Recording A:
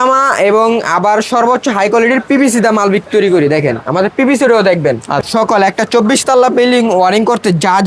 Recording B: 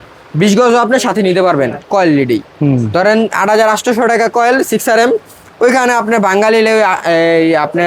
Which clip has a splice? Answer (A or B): A